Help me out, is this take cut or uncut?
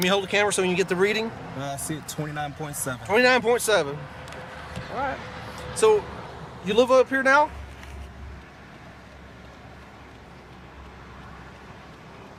uncut